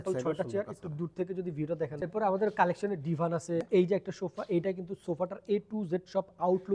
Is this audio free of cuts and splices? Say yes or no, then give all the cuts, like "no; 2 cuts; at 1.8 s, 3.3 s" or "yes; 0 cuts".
no; 2 cuts; at 2.0 s, 3.7 s